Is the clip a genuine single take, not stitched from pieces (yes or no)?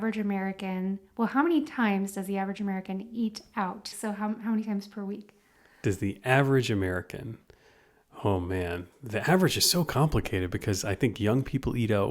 no